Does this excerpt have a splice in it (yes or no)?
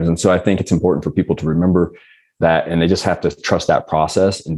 no